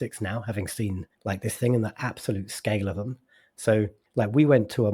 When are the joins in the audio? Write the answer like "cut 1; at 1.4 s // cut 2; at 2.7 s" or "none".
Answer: cut 1; at 1.1 s // cut 2; at 4.0 s